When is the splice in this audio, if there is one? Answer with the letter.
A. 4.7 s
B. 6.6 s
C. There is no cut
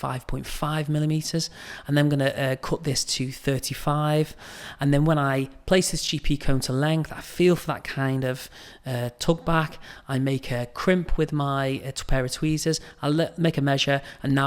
C